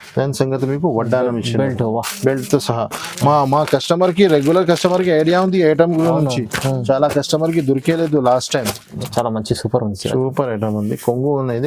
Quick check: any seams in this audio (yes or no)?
yes